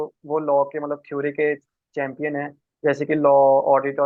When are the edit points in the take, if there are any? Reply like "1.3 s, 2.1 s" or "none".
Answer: none